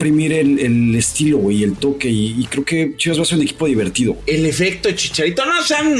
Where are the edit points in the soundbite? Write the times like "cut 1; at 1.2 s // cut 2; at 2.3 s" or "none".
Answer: cut 1; at 4.2 s

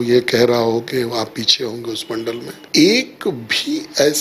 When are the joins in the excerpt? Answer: cut 1; at 2.6 s

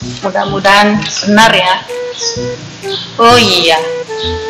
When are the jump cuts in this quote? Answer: none

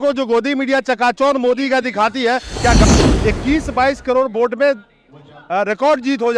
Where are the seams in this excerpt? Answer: cut 1; at 2.8 s

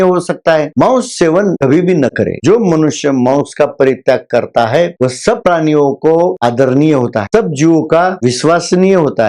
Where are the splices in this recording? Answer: cut 1; at 2.4 s

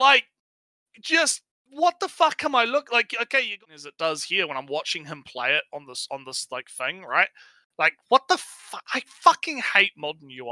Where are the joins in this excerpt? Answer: cut 1; at 3.5 s

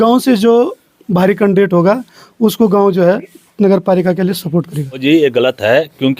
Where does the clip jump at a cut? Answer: cut 1; at 5.0 s

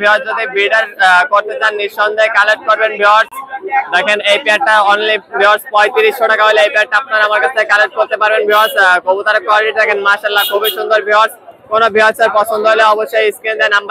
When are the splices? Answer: none

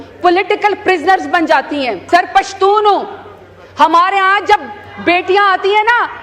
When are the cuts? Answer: cut 1; at 2.0 s

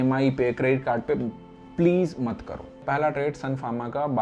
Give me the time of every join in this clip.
cut 1; at 2.7 s

